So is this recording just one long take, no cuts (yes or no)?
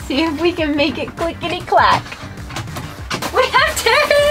no